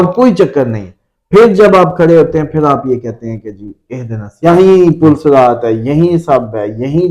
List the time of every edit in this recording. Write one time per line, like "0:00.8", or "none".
0:04.4